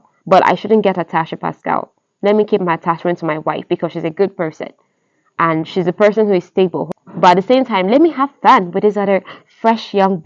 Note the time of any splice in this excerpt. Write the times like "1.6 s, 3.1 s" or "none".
6.8 s